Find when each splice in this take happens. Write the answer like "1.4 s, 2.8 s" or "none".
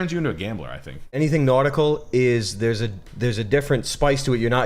1.2 s